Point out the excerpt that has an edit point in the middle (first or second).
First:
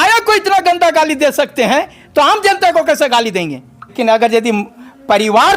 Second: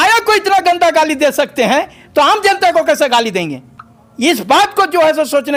first